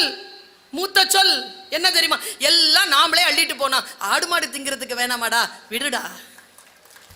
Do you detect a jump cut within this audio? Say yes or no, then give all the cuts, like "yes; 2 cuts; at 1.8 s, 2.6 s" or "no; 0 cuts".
no; 0 cuts